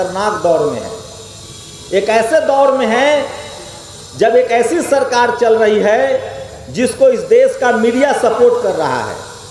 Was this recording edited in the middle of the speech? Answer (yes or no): no